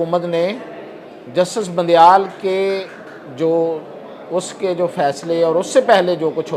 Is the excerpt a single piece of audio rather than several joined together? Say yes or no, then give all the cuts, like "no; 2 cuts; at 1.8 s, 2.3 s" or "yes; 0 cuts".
yes; 0 cuts